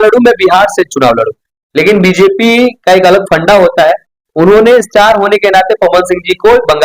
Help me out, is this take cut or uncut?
uncut